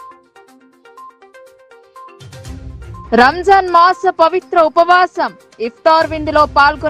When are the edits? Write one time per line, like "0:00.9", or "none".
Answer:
0:01.0